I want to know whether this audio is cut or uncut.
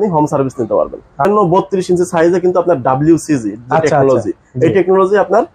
cut